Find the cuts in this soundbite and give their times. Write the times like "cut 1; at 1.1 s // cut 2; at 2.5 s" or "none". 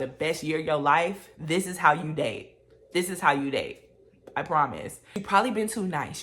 cut 1; at 5.2 s